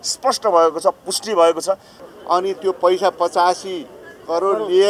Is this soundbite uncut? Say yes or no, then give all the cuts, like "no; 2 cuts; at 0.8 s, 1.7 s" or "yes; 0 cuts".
no; 1 cut; at 2.0 s